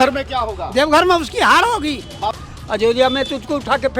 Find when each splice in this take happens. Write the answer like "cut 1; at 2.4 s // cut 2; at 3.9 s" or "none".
cut 1; at 2.3 s